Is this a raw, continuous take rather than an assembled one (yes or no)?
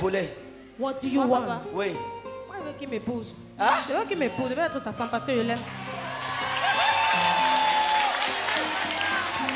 yes